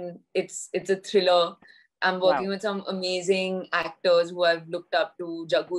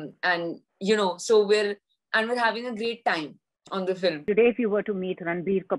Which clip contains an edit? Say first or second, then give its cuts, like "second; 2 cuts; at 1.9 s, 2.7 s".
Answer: second; 1 cut; at 4.2 s